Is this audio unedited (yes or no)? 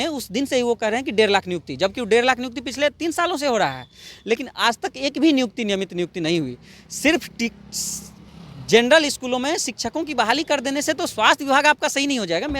yes